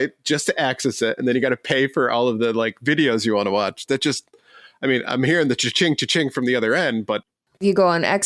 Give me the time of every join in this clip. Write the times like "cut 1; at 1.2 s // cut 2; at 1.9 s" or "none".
none